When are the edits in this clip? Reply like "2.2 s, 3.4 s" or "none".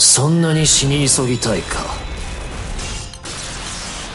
3.1 s